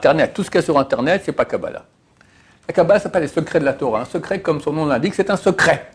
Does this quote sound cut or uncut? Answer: uncut